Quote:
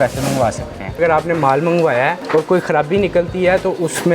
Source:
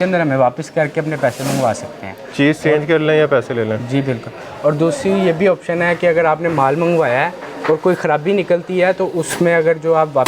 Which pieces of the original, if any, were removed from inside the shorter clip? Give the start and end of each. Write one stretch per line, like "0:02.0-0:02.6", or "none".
0:02.2-0:06.1
0:07.3-0:07.5